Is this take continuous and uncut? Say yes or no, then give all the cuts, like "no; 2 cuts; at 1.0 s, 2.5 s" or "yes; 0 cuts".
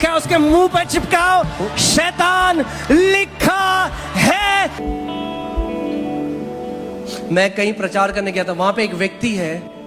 no; 1 cut; at 4.8 s